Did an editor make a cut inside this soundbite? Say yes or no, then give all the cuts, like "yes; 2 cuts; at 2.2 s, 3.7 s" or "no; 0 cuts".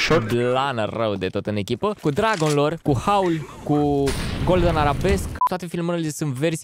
yes; 3 cuts; at 2.0 s, 2.8 s, 5.4 s